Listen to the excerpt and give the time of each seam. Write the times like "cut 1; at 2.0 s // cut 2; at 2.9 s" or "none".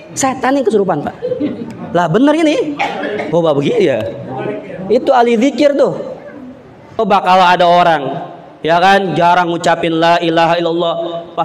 cut 1; at 7.0 s